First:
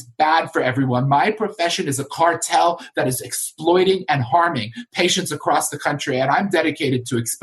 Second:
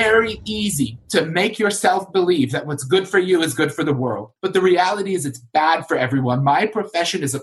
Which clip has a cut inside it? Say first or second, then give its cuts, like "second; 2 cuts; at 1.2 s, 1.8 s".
second; 2 cuts; at 1.0 s, 4.3 s